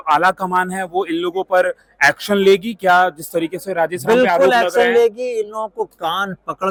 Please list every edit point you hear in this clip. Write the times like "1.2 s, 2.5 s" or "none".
none